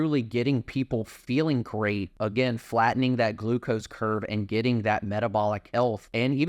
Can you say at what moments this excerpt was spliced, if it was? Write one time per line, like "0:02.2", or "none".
0:02.1
0:05.7